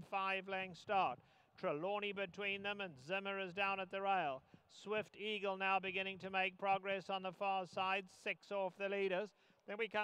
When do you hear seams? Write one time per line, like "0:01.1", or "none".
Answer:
none